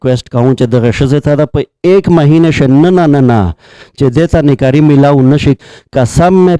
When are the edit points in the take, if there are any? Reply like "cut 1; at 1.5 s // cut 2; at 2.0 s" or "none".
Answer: cut 1; at 5.6 s